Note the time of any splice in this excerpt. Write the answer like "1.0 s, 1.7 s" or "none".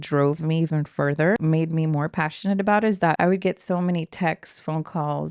1.4 s, 3.2 s